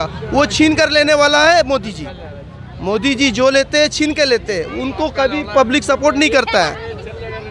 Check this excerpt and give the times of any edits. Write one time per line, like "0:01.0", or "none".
none